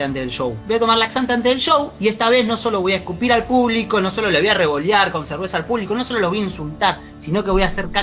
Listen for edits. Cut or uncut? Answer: uncut